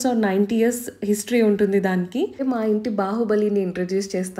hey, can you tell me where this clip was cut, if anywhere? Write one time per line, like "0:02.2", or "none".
0:02.4